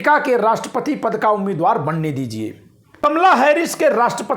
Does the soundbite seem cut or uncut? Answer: cut